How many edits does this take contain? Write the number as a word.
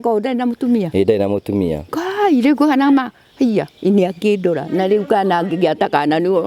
zero